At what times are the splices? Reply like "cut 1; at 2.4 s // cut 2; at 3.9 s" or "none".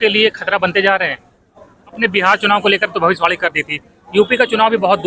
cut 1; at 2.0 s